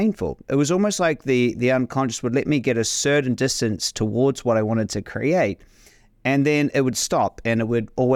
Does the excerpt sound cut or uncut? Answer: uncut